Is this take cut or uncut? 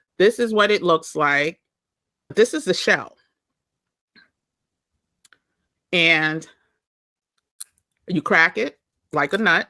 cut